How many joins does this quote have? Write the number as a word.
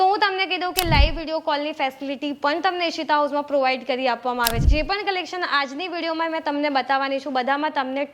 one